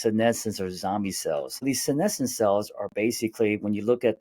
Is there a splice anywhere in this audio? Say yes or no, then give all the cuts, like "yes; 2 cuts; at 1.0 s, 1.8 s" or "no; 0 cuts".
yes; 1 cut; at 1.6 s